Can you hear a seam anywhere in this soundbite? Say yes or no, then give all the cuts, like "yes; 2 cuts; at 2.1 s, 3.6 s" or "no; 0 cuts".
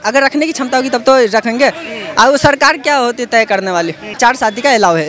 yes; 1 cut; at 4.1 s